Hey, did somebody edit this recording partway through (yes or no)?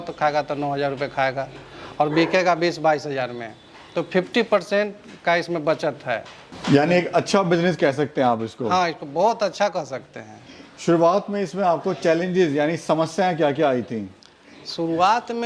no